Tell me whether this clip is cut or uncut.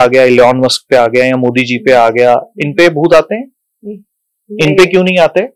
uncut